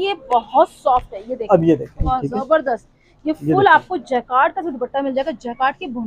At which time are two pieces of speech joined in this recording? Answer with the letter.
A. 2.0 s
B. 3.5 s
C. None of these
A